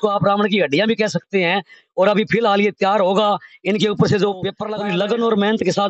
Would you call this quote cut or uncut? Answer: cut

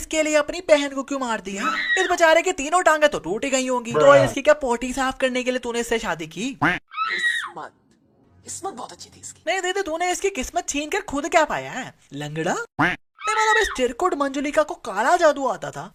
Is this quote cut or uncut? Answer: uncut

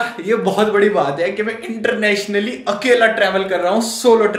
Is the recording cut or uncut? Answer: uncut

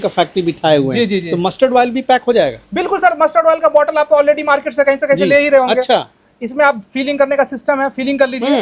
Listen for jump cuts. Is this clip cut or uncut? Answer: uncut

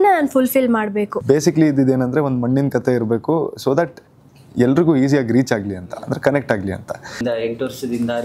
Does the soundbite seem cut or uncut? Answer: cut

